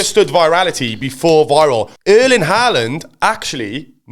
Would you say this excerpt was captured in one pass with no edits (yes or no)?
no